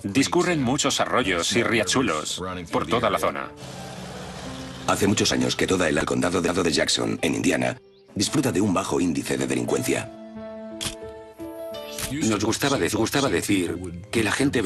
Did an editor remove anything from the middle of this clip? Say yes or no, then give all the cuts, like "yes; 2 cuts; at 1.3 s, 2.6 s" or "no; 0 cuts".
yes; 1 cut; at 7.7 s